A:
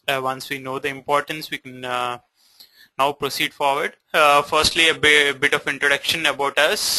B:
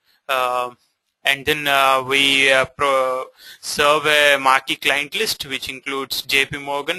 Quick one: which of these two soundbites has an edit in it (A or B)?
A